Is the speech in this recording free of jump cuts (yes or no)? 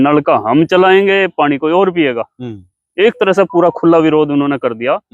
yes